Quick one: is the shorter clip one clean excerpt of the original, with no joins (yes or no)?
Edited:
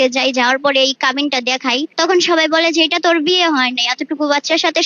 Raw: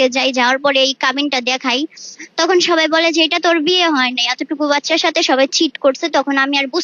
no